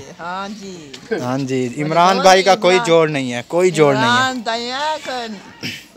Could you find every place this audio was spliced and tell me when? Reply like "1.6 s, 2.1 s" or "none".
none